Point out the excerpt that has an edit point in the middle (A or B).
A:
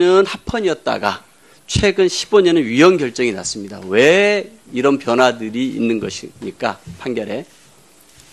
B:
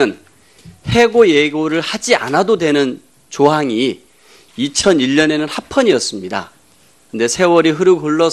B